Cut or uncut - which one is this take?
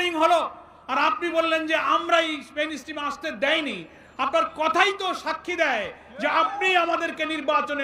uncut